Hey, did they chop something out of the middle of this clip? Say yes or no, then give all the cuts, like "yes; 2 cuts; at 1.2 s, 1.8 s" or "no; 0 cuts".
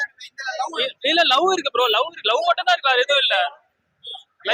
no; 0 cuts